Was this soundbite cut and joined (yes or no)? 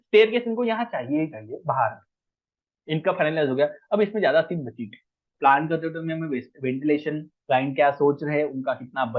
yes